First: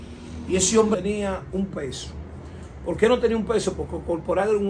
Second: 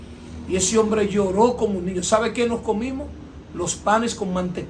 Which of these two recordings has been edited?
first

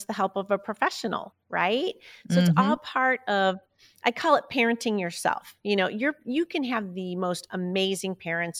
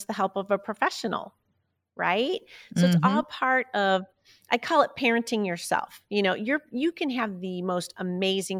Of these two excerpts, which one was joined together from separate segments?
first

